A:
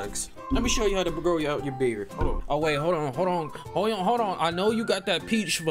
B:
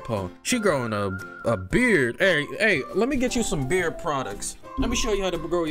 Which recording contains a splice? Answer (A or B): A